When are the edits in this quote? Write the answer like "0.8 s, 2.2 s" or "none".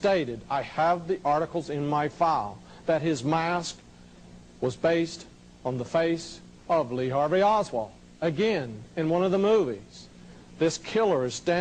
none